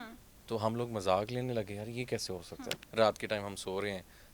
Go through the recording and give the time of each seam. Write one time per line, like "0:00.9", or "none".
0:02.8

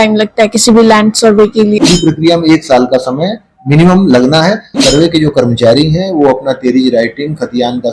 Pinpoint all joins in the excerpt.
0:01.8
0:04.8

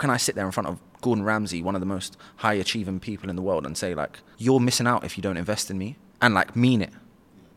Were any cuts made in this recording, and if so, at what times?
0:04.2
0:06.0

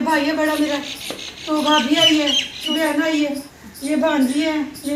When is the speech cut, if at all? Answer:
0:02.7

